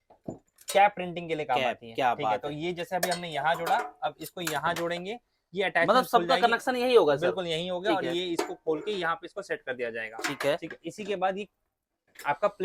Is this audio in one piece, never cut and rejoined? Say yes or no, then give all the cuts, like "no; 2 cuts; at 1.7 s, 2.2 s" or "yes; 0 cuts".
yes; 0 cuts